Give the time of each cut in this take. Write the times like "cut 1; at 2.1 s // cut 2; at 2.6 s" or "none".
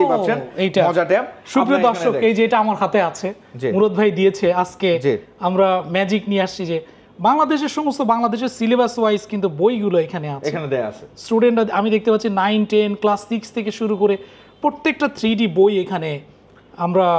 none